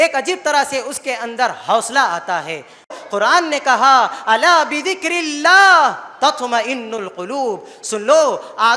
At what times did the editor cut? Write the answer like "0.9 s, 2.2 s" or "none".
3.0 s